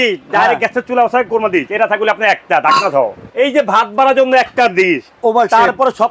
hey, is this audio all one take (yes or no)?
no